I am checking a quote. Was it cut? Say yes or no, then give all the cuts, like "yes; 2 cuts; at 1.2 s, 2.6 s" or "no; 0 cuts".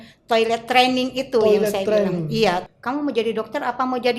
yes; 1 cut; at 2.7 s